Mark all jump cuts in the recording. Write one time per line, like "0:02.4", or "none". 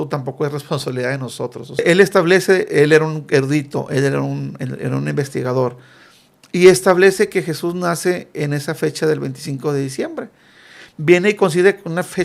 0:01.8